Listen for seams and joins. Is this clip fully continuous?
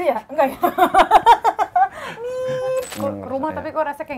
no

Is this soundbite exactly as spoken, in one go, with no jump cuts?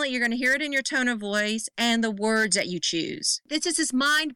no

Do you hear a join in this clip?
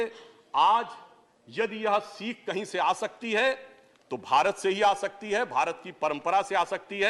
no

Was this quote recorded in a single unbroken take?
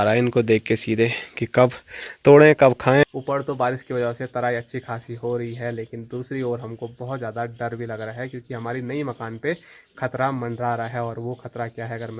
no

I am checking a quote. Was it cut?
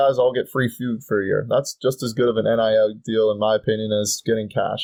no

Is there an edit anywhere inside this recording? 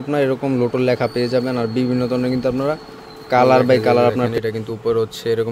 yes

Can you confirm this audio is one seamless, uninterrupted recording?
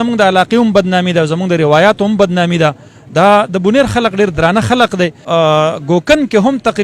no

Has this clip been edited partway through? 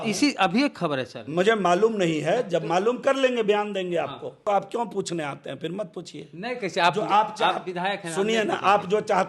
yes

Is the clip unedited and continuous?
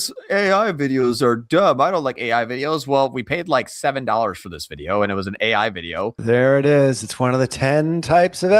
no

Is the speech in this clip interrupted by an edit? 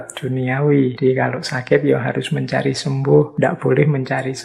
yes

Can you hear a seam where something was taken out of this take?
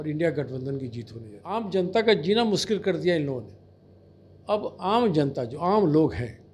yes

